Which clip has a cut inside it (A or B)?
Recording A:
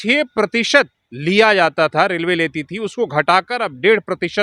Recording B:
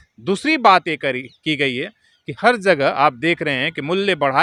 A